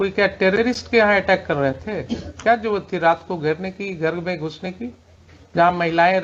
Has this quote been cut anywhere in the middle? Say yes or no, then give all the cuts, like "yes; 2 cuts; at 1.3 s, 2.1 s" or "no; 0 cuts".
no; 0 cuts